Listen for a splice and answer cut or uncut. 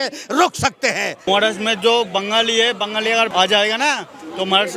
cut